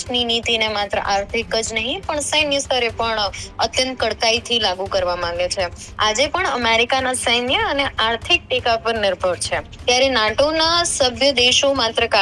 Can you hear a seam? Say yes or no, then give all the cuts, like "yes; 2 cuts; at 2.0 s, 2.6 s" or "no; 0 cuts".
yes; 2 cuts; at 5.8 s, 9.7 s